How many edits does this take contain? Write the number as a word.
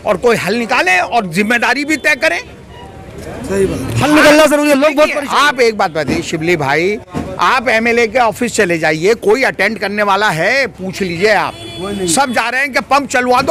zero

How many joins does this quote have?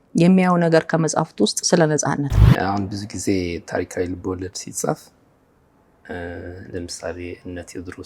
one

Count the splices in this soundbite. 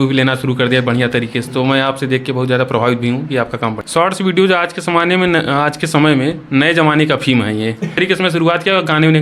two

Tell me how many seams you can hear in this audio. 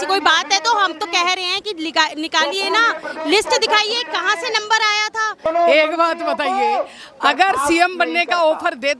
one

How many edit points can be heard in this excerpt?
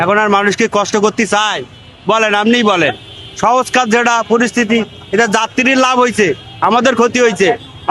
zero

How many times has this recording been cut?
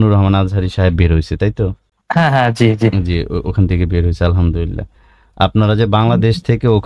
one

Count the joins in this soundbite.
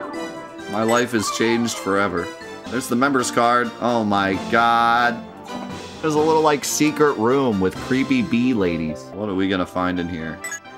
two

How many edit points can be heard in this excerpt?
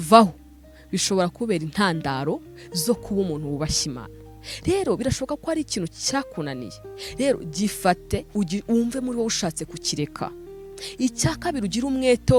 zero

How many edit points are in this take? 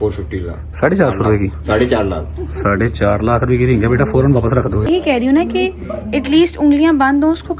three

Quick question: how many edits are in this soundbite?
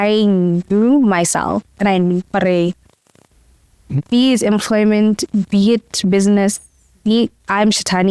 zero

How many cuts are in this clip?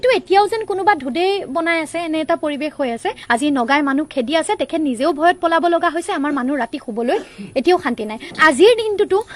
two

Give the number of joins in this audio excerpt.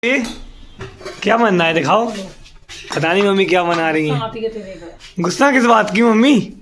one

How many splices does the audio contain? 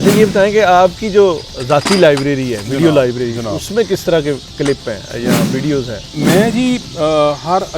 one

